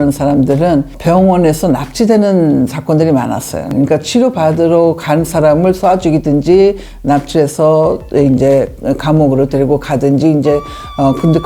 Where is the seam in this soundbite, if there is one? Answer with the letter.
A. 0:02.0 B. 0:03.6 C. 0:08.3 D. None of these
B